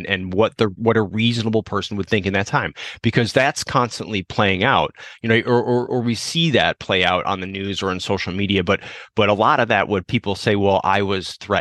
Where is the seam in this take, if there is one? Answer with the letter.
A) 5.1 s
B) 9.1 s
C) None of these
C